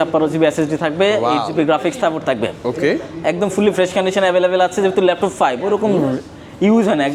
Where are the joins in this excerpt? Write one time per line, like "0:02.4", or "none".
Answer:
none